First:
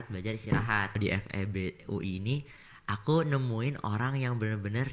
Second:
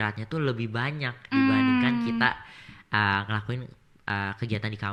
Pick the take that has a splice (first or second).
first